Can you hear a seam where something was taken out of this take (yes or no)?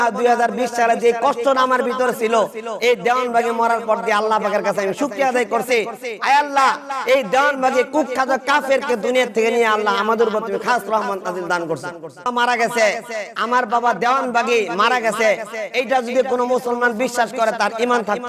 yes